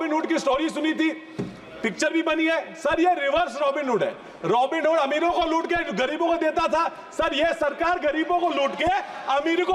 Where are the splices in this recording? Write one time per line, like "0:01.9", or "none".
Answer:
none